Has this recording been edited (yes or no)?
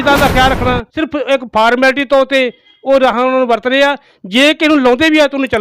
yes